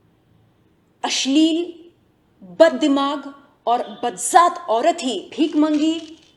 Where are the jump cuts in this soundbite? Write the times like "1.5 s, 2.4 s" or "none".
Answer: 5.2 s

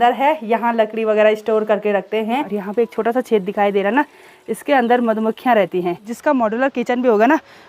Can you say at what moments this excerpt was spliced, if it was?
2.5 s, 6.1 s

